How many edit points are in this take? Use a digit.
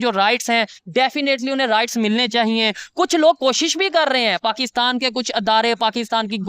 0